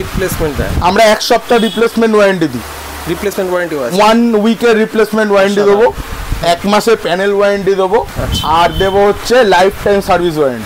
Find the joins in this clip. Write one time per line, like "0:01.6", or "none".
none